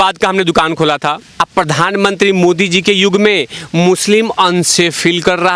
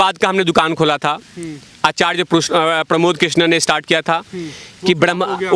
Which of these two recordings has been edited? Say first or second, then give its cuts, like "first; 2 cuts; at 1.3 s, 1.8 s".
first; 1 cut; at 1.2 s